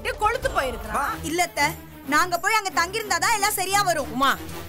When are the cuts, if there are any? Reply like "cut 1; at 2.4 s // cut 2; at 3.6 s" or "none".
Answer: cut 1; at 1.1 s

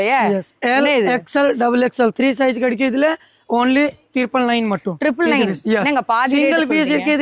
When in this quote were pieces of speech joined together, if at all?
none

